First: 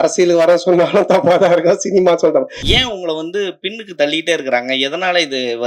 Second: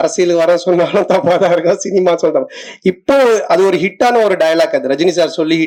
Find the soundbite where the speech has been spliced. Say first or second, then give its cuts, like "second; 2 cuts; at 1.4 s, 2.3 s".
first; 1 cut; at 2.6 s